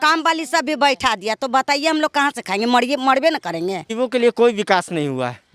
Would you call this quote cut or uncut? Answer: cut